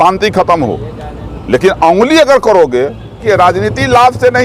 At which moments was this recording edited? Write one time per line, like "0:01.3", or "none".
0:03.2